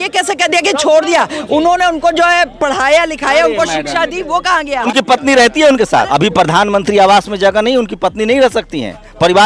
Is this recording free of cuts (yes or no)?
no